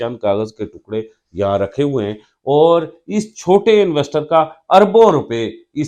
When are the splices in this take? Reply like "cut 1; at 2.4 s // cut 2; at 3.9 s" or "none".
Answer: none